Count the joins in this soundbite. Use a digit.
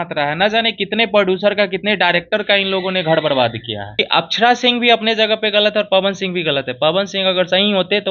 1